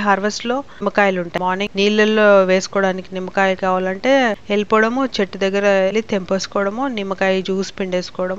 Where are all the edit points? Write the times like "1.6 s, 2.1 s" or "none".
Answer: 1.4 s, 4.4 s, 5.9 s